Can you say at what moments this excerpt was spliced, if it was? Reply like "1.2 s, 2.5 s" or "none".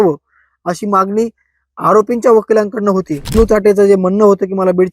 3.3 s